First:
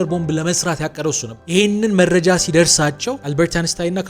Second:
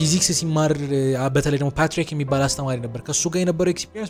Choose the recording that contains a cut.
first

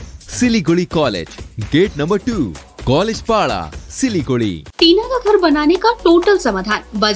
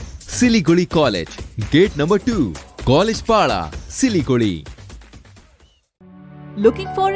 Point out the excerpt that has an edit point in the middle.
first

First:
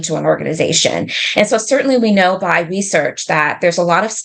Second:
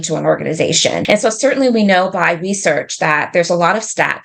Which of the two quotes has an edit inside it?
second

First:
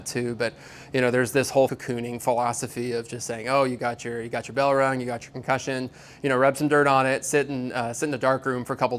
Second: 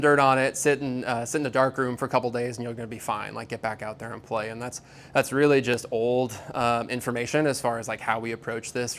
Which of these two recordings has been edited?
first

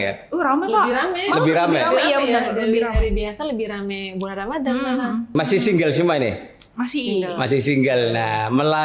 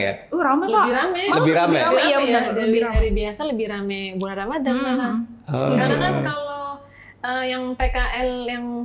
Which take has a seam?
first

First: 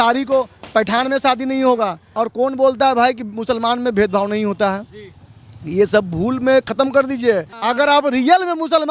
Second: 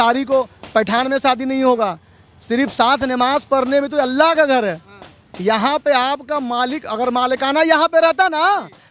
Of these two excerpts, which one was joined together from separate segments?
first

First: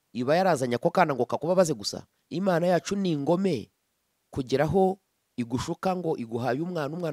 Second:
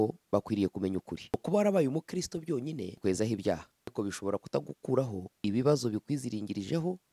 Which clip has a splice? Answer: second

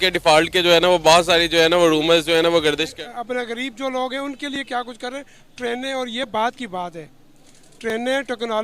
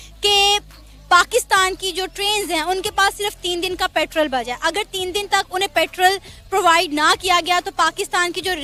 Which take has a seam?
first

